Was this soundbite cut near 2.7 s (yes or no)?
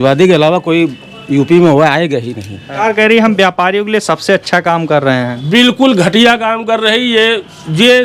yes